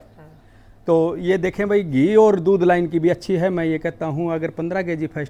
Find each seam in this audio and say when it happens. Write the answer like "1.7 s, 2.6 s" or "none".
none